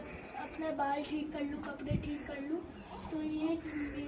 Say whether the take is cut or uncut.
uncut